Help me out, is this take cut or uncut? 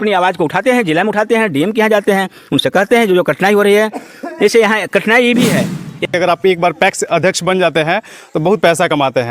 cut